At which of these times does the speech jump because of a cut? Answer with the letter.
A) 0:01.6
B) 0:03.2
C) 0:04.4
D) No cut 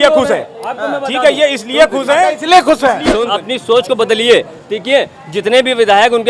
B